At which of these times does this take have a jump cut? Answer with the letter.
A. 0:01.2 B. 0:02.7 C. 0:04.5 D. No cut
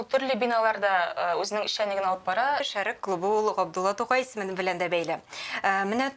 B